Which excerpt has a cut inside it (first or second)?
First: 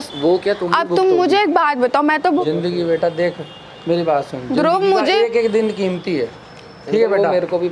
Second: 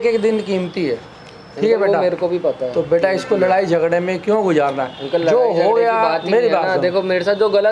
first